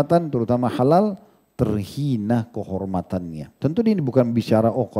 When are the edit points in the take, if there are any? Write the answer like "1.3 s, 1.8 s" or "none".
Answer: 3.5 s

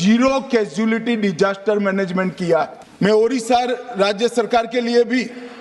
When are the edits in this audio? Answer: 2.8 s

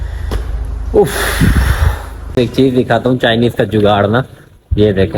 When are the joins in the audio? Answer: 2.3 s

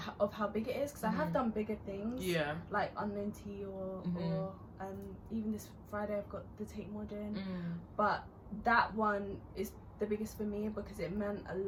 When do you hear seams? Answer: none

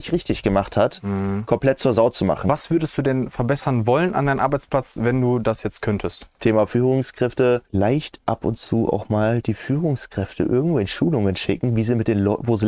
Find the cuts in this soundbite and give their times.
2.5 s, 6.3 s, 7.7 s

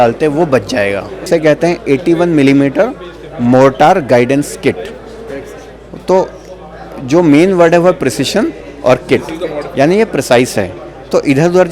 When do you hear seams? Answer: 1.2 s

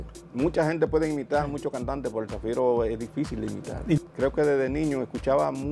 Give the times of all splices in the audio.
4.0 s

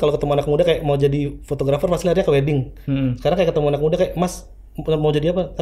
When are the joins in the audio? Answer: none

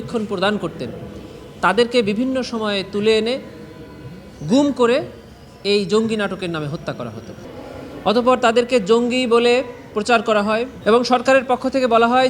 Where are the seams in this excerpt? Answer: 7.5 s, 10.7 s

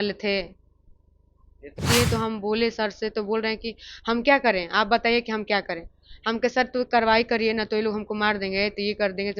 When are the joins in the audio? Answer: 1.8 s

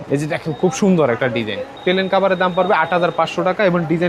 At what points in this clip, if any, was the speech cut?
none

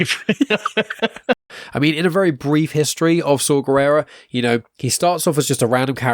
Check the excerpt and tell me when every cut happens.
1.5 s

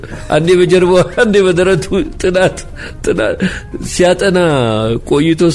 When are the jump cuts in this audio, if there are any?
none

